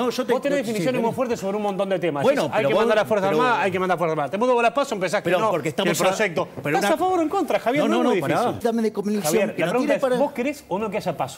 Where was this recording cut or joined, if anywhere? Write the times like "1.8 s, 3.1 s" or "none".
8.6 s

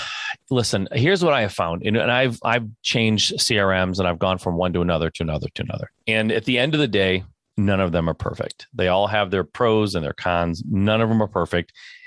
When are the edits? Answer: 5.9 s, 7.4 s

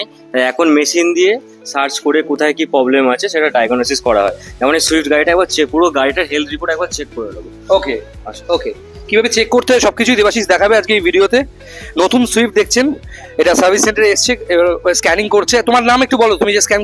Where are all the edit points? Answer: none

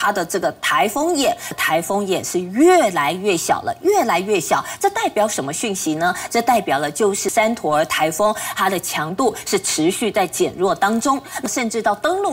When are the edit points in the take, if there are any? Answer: 1.6 s, 7.3 s, 11.4 s

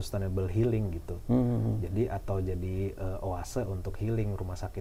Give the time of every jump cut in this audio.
none

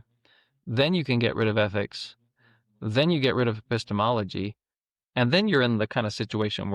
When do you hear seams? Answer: none

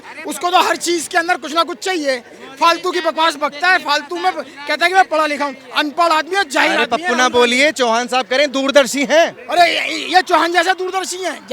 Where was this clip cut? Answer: none

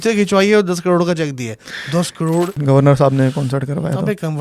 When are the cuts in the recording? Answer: 2.6 s

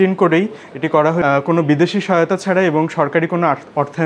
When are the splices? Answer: 1.2 s

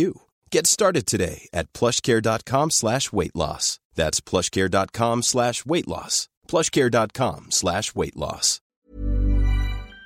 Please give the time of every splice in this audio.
8.8 s

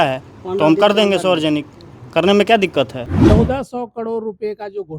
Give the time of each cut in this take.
3.1 s

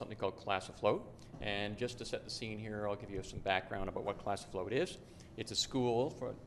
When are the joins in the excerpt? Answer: 3.7 s

